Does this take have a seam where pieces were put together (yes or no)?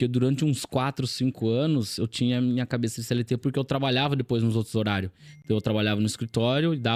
no